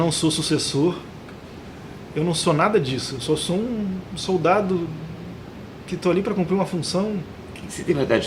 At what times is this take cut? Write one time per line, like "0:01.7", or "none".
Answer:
none